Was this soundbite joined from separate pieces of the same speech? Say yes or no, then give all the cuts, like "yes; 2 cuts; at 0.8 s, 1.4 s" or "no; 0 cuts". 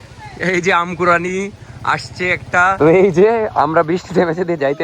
yes; 1 cut; at 2.8 s